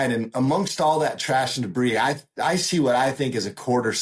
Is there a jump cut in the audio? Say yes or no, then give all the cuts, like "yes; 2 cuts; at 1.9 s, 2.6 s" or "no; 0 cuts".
no; 0 cuts